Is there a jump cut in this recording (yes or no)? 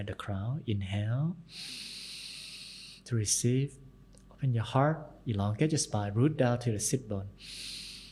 no